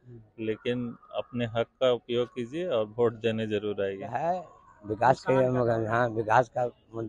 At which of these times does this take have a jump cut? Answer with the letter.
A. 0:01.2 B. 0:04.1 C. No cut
B